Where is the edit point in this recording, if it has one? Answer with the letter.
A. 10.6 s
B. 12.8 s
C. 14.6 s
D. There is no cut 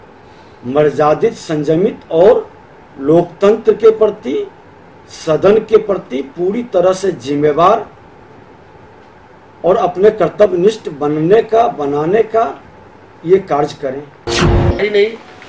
C